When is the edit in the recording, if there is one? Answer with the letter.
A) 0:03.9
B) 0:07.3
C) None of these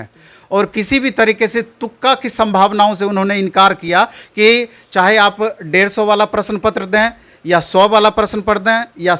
C